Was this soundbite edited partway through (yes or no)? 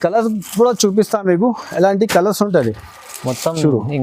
no